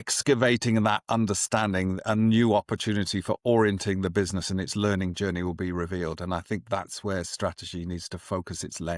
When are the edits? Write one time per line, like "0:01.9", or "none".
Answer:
none